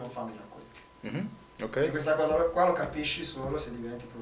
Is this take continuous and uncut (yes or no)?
yes